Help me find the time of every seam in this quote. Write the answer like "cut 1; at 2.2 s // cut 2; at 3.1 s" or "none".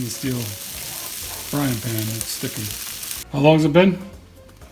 cut 1; at 3.2 s